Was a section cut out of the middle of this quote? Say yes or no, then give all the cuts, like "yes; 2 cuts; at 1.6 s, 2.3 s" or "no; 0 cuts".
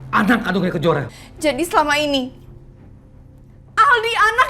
yes; 1 cut; at 1.1 s